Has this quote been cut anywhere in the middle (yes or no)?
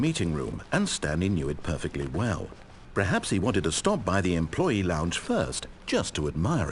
no